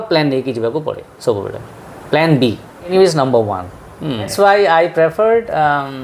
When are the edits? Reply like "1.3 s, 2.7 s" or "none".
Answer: 2.9 s, 4.3 s

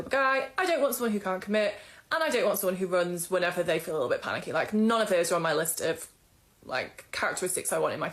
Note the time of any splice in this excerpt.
4.9 s

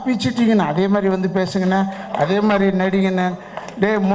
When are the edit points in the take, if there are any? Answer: none

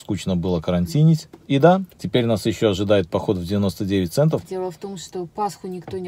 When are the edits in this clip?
1.3 s, 2.0 s, 4.4 s

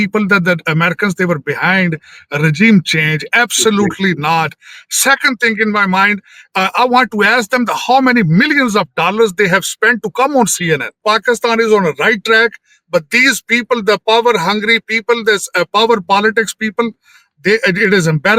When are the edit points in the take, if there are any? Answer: 11.0 s

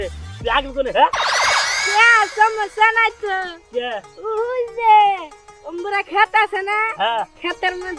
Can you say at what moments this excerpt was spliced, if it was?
none

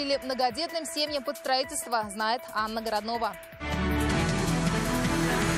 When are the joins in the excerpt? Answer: 3.5 s

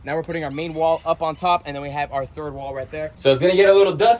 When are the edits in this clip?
3.1 s

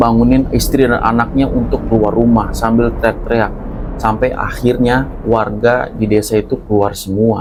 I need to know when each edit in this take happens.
none

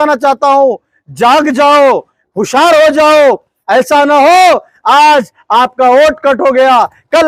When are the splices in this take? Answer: none

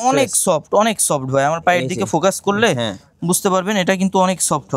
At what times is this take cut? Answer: none

